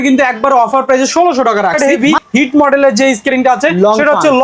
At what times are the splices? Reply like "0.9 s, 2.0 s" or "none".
1.7 s

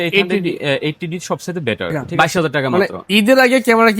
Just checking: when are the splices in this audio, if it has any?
2.0 s

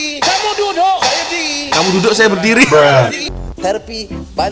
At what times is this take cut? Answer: 3.2 s

